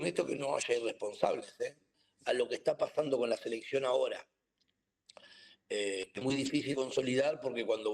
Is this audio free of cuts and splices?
no; 1 cut; at 1.9 s

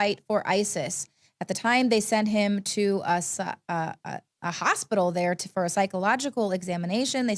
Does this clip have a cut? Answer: no; 0 cuts

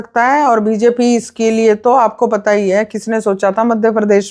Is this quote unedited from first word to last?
yes; 0 cuts

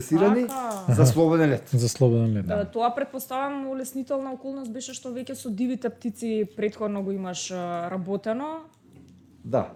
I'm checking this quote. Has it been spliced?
no; 0 cuts

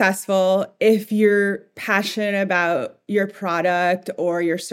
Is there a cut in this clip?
no; 0 cuts

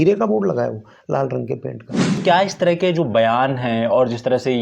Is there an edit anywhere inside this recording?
yes; 1 cut; at 2.2 s

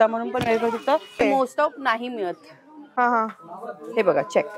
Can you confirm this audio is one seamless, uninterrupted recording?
no; 1 cut; at 1.2 s

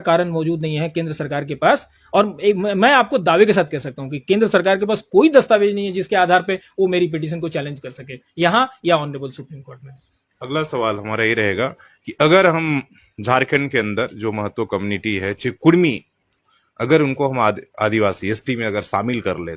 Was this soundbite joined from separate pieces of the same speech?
no; 0 cuts

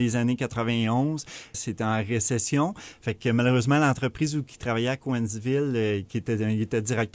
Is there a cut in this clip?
yes; 1 cut; at 1.6 s

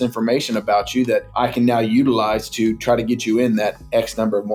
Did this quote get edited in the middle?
yes; 1 cut; at 1.3 s

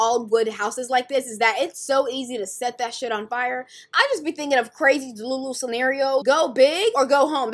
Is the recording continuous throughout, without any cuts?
no; 1 cut; at 6.2 s

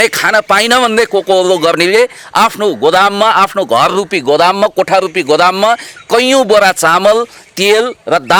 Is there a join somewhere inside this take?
no; 0 cuts

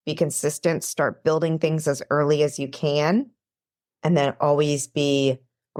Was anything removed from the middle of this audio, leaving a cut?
no; 0 cuts

